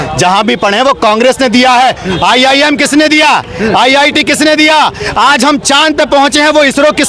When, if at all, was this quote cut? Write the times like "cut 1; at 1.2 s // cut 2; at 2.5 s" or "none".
none